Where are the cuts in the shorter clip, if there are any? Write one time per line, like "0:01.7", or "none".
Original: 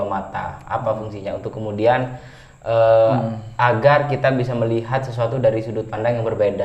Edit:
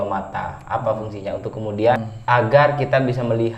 0:02.1